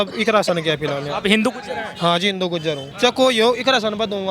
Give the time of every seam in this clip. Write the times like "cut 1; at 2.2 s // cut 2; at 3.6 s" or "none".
cut 1; at 2.9 s